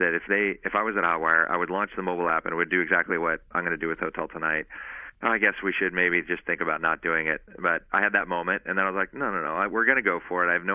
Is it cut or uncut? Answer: uncut